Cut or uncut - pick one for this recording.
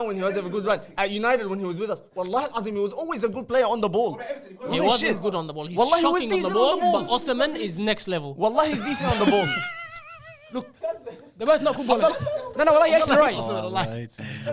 uncut